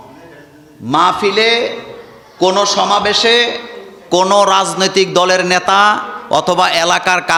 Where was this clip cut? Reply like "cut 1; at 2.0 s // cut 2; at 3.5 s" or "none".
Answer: none